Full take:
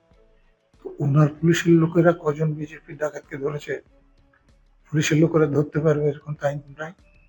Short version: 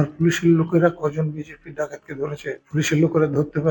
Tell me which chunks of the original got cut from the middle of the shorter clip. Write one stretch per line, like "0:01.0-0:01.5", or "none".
0:03.9-0:04.8